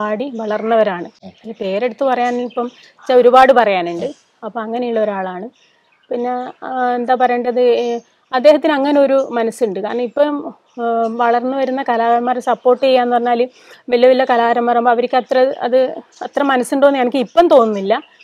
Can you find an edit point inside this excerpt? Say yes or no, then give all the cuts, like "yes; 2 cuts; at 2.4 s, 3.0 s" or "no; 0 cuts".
no; 0 cuts